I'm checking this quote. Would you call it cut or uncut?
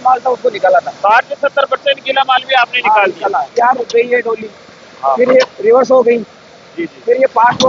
cut